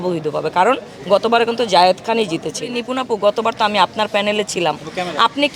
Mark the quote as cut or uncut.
cut